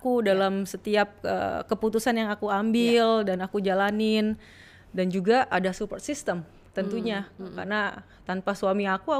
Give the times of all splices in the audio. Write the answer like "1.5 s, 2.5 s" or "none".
none

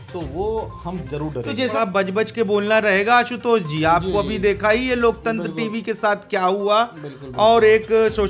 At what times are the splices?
1.8 s

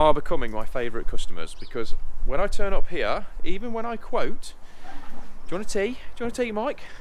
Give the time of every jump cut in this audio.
none

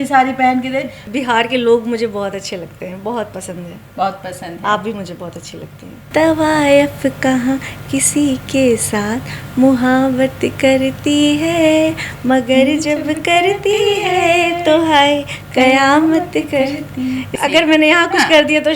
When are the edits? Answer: 1.0 s, 5.9 s, 17.3 s

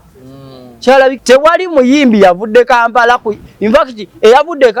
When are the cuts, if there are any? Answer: 1.2 s

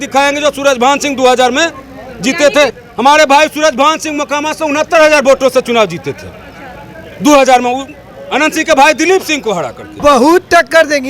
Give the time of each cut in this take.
2.8 s, 10.0 s

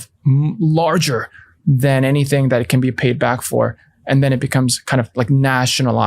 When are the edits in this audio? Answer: none

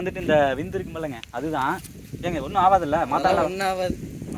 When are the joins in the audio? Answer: none

